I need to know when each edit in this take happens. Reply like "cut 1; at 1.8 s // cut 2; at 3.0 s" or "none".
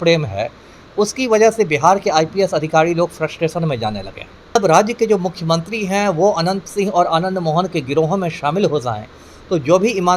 cut 1; at 4.6 s